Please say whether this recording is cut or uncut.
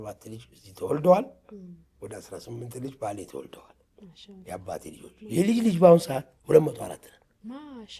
cut